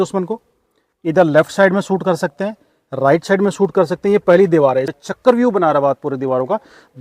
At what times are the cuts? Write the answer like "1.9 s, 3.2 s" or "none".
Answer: 4.9 s